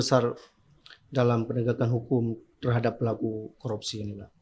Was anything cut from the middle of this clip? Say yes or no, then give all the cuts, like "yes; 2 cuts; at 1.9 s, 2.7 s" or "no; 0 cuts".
no; 0 cuts